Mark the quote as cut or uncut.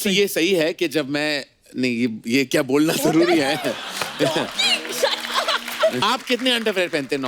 cut